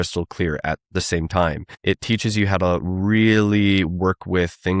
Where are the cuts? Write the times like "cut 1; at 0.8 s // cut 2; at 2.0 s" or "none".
cut 1; at 1.7 s